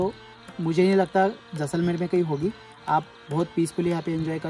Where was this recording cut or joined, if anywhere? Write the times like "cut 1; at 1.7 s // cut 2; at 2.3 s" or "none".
none